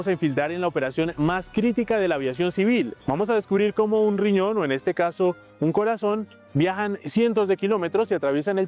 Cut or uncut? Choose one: uncut